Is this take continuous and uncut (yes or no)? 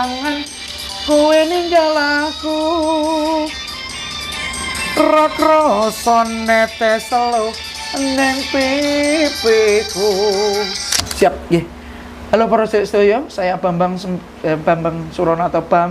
no